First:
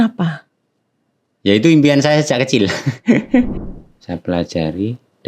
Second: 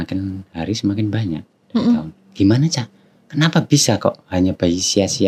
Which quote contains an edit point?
first; 1 cut; at 3.5 s

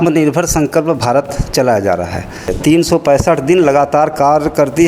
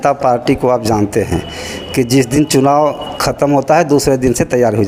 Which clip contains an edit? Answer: first; 1 cut; at 2.5 s

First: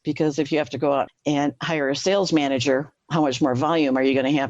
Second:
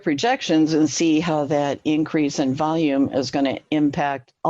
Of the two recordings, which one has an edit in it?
first; 2 cuts; at 1.1 s, 3.0 s

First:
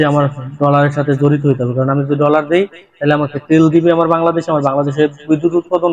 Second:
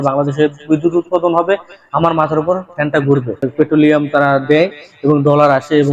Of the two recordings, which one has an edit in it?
second; 1 cut; at 3.5 s

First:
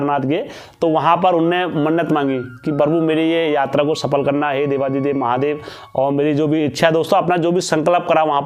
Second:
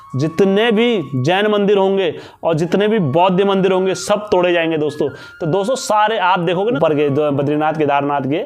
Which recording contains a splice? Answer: second; 1 cut; at 6.8 s

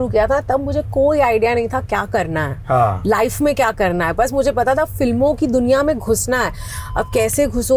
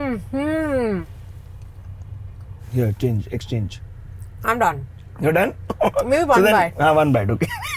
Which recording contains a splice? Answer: second; 2 cuts; at 1.0 s, 2.6 s

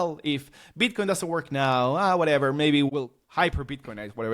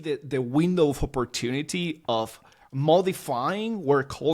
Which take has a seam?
first; 1 cut; at 2.9 s

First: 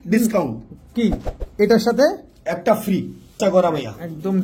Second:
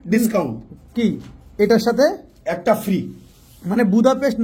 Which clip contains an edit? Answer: first; 1 cut; at 3.4 s

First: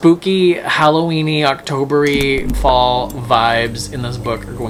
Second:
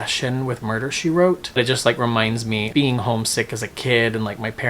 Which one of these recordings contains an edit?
second; 2 cuts; at 1.5 s, 2.7 s

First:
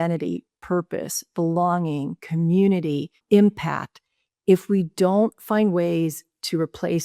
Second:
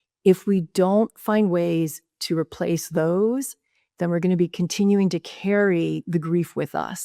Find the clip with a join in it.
first; 1 cut; at 3.2 s

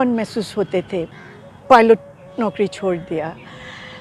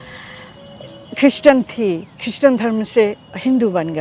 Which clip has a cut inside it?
first; 1 cut; at 1.1 s

